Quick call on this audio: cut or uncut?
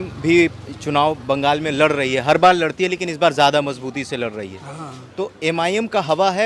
uncut